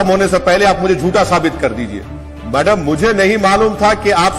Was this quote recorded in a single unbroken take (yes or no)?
no